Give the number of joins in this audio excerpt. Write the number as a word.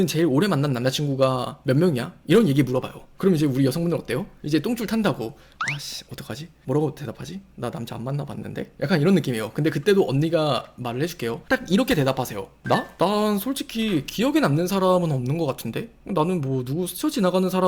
zero